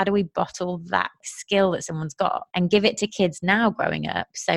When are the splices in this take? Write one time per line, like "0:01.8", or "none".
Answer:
0:01.2
0:02.4